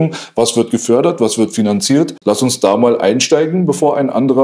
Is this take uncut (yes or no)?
no